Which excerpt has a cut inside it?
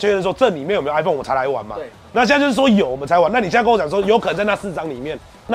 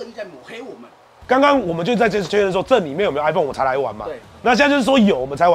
second; 1 cut; at 1.2 s

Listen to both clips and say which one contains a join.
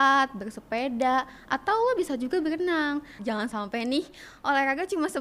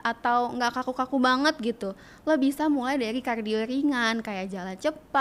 first; 1 cut; at 3.1 s

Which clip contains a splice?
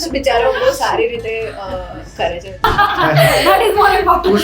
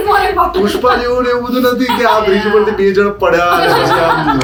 first; 1 cut; at 2.6 s

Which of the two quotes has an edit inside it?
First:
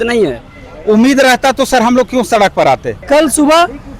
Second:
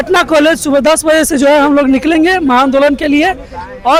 first; 1 cut; at 3.0 s

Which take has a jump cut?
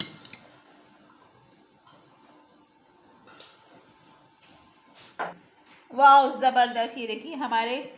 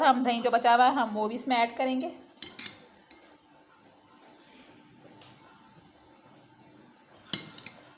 first; 1 cut; at 5.5 s

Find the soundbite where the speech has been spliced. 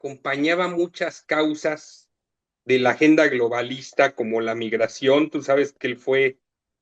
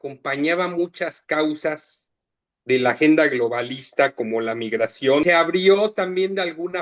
second; 1 cut; at 5.2 s

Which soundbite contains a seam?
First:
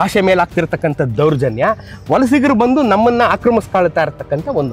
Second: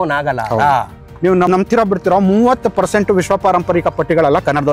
second; 1 cut; at 1.0 s

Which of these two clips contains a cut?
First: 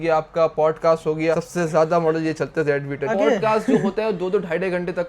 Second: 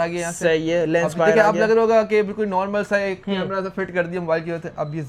first; 1 cut; at 3.1 s

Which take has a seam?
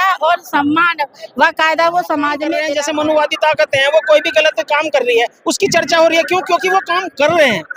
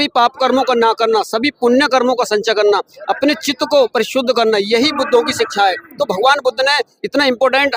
first; 1 cut; at 2.6 s

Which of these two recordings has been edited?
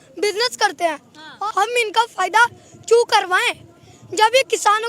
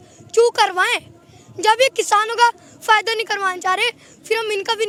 first; 1 cut; at 1.3 s

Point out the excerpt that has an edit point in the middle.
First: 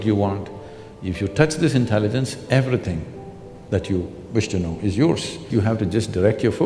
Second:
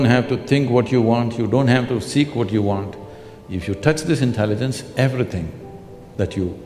first; 1 cut; at 5.4 s

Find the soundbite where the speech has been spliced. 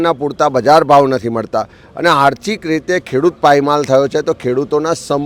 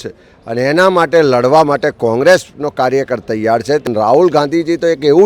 second; 1 cut; at 3.8 s

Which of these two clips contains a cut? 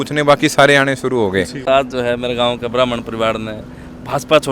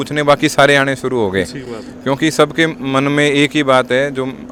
first; 1 cut; at 1.6 s

